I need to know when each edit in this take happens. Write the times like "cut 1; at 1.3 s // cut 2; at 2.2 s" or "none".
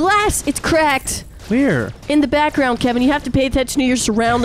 none